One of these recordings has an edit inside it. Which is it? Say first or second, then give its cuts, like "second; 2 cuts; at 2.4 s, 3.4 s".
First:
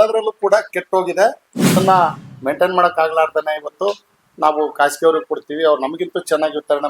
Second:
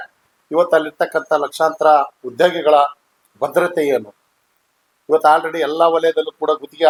first; 1 cut; at 1.7 s